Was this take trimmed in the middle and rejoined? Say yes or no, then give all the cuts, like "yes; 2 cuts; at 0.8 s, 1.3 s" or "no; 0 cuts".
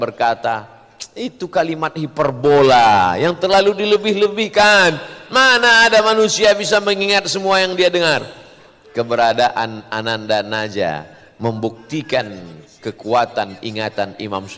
no; 0 cuts